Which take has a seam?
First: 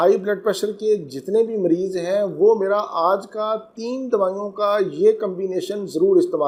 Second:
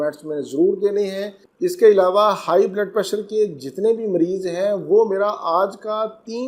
second; 1 cut; at 1.5 s

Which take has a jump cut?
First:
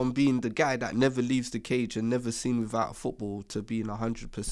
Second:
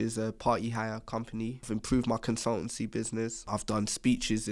second; 2 cuts; at 1.7 s, 3.5 s

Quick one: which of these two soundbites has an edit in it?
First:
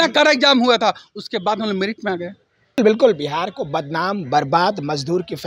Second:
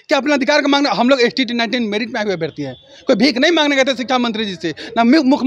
first; 1 cut; at 2.8 s

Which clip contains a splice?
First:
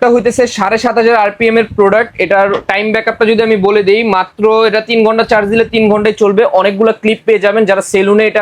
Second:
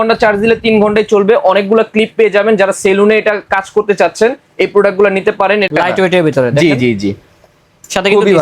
second; 1 cut; at 5.7 s

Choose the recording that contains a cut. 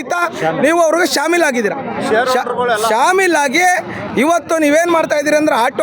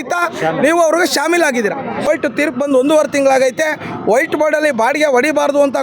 second; 1 cut; at 2.1 s

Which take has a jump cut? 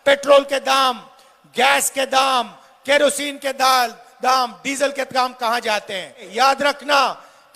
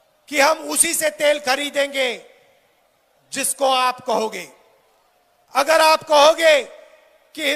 first; 1 cut; at 6.3 s

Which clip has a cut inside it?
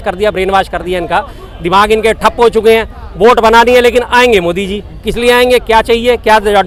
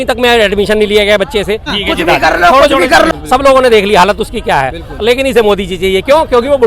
second; 2 cuts; at 1.7 s, 3.1 s

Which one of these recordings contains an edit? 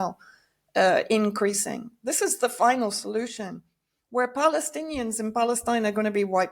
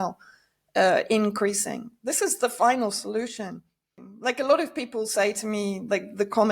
second; 1 cut; at 4.0 s

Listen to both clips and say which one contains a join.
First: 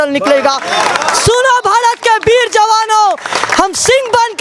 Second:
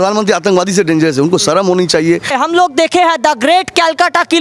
second; 1 cut; at 2.3 s

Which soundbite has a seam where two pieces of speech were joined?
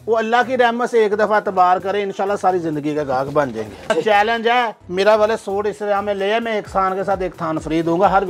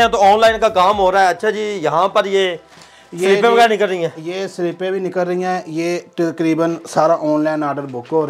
first; 1 cut; at 3.9 s

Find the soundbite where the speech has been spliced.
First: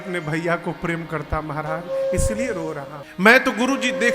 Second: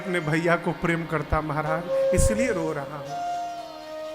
first; 1 cut; at 3.0 s

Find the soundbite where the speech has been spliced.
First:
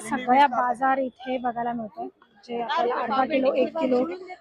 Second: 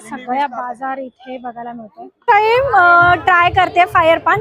second; 1 cut; at 2.2 s

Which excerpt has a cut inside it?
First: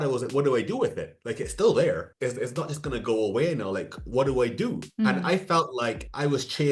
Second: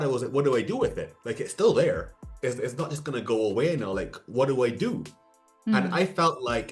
first; 2 cuts; at 2.1 s, 4.8 s

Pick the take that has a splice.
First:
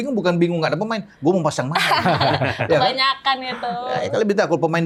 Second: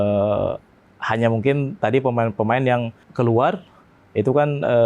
second; 1 cut; at 3.0 s

